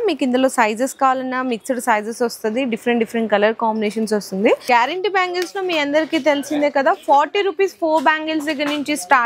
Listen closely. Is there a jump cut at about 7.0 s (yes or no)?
no